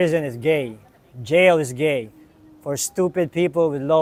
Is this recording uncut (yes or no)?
yes